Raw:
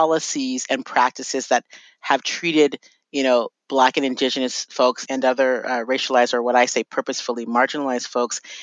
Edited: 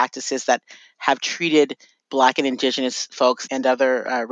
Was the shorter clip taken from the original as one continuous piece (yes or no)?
no